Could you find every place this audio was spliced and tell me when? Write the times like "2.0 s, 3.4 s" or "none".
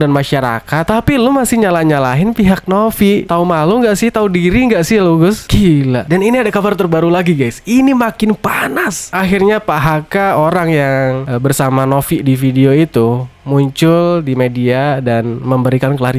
none